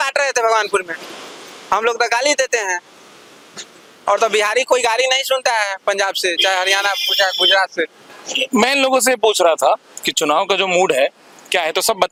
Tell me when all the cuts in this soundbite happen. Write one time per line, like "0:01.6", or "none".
none